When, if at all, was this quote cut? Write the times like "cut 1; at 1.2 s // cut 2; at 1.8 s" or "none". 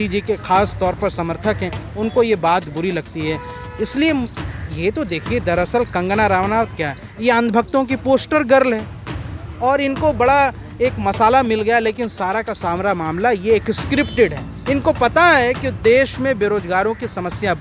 none

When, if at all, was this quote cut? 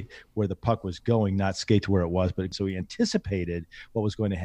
cut 1; at 2.5 s

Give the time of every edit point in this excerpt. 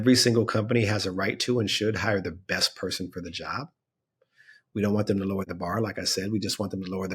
cut 1; at 5.5 s

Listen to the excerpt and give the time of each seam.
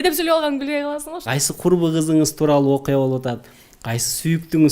cut 1; at 1.2 s

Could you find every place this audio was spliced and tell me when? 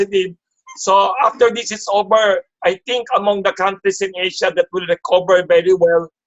none

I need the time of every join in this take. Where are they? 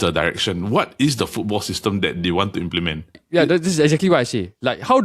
cut 1; at 3.2 s

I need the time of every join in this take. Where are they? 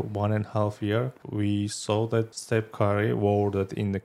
cut 1; at 1.2 s // cut 2; at 2.4 s

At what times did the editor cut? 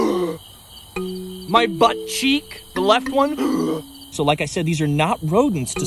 cut 1; at 4.1 s

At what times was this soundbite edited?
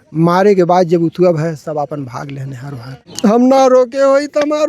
cut 1; at 3.0 s

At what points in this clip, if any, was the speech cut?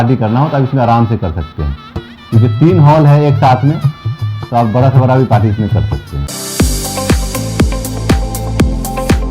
cut 1; at 6.2 s

